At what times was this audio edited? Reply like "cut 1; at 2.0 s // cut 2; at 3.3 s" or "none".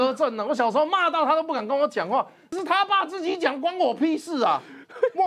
cut 1; at 2.5 s